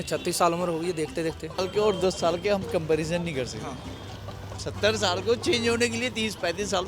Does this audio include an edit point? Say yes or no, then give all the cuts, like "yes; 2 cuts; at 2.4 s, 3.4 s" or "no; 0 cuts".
yes; 1 cut; at 1.6 s